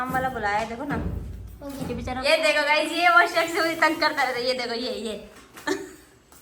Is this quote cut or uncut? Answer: cut